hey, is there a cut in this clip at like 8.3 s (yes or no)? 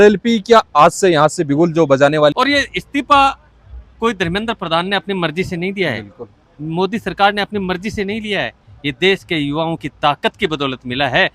no